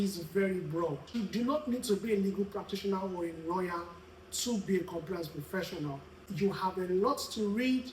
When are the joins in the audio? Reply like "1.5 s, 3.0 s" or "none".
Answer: 1.1 s, 6.2 s